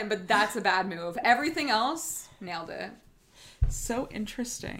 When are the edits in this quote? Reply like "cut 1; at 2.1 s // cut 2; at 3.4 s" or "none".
none